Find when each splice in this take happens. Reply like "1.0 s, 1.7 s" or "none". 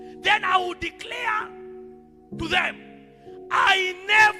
none